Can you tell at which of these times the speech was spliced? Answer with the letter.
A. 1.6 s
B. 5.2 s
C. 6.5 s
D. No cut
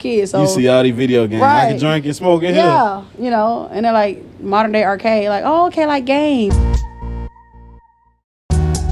C